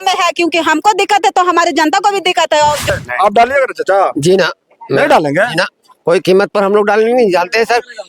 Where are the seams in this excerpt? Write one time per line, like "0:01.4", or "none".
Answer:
0:02.9